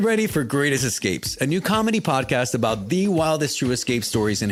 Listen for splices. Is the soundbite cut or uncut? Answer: uncut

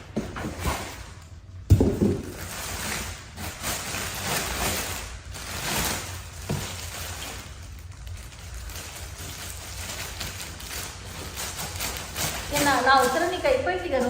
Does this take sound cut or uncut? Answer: uncut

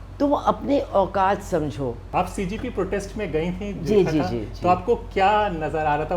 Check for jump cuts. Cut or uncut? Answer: cut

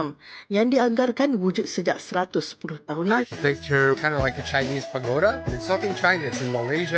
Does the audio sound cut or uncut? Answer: cut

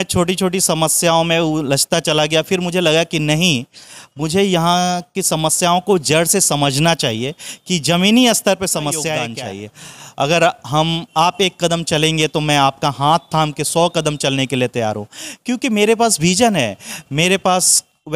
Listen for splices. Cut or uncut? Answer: cut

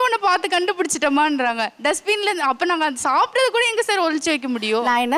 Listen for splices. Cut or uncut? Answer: uncut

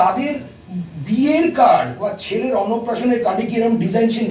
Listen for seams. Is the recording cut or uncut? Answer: uncut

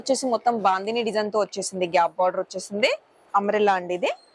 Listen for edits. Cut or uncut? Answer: cut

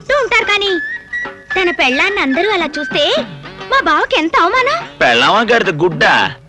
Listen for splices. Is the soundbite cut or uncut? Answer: uncut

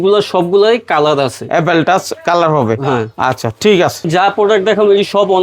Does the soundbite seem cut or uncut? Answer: uncut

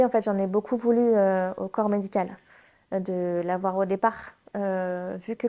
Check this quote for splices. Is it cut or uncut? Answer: uncut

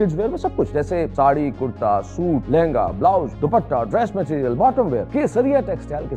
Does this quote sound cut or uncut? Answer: cut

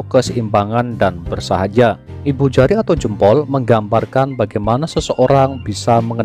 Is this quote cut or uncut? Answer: cut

